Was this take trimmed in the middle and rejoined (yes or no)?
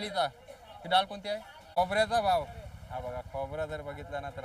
yes